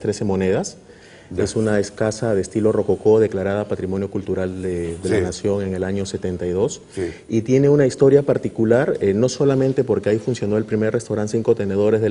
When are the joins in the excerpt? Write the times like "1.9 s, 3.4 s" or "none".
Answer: 3.0 s